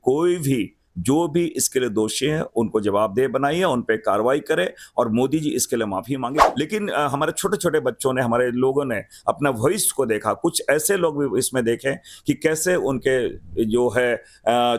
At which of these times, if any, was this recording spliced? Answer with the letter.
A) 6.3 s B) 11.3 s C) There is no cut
A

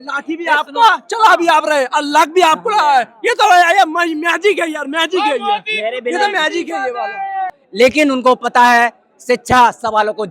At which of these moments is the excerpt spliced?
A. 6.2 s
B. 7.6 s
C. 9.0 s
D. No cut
B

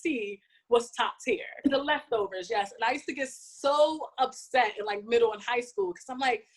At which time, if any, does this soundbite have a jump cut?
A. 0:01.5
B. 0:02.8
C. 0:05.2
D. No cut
A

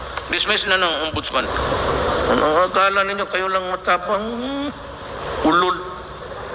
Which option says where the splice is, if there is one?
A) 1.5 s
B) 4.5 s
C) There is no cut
A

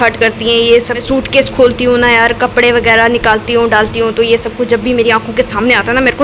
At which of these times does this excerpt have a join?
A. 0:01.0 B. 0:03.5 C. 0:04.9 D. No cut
A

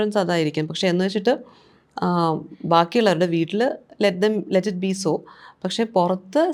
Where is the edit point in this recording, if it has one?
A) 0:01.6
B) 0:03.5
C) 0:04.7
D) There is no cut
D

